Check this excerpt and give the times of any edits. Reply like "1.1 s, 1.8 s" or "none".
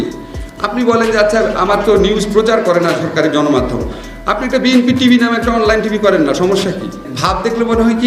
7.1 s